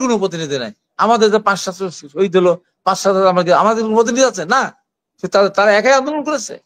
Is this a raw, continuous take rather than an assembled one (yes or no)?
yes